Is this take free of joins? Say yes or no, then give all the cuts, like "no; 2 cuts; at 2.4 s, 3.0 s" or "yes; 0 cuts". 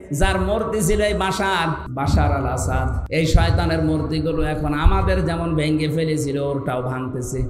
no; 2 cuts; at 1.9 s, 3.0 s